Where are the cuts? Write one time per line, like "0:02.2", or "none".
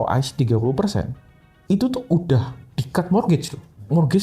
none